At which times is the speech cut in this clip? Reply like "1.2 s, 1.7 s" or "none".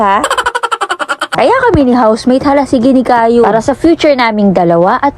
1.4 s